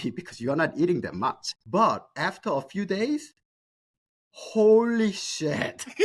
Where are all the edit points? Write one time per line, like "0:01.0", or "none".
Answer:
0:01.5